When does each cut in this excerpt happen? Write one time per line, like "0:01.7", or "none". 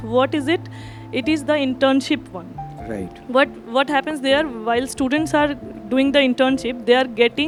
none